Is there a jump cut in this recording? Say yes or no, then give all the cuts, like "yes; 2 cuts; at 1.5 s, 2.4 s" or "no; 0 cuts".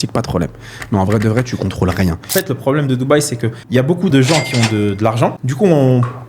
yes; 3 cuts; at 2.3 s, 4.1 s, 5.4 s